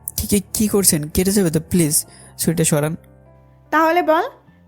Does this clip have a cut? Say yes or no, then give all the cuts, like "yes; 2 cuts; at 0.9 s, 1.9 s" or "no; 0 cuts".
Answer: no; 0 cuts